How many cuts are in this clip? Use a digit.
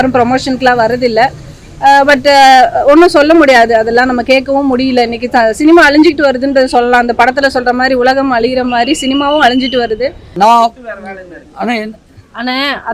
1